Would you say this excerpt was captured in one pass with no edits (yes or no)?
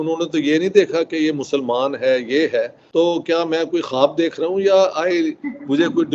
no